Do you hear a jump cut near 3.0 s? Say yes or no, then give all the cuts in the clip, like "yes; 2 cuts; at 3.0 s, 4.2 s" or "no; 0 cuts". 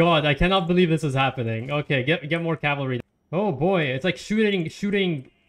yes; 1 cut; at 3.0 s